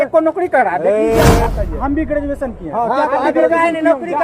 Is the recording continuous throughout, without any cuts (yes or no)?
no